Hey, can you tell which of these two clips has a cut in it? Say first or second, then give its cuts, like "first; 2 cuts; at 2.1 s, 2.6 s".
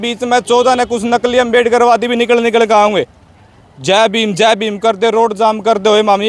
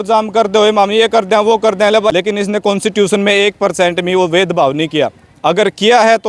second; 1 cut; at 2.1 s